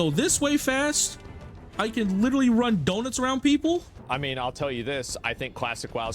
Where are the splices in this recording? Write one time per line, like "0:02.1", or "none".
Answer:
0:04.0